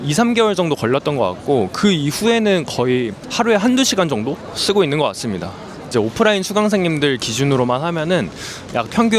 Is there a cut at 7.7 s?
no; 1 cut; at 5.9 s

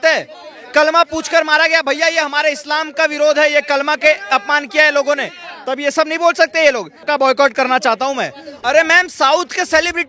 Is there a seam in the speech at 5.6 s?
no; 2 cuts; at 7.1 s, 8.6 s

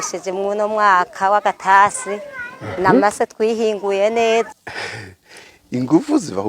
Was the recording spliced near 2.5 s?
no; 1 cut; at 4.5 s

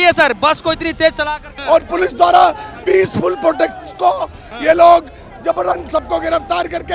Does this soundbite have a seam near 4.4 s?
no; 1 cut; at 1.5 s

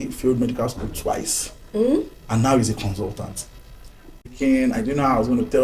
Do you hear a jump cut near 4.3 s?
yes; 1 cut; at 4.3 s

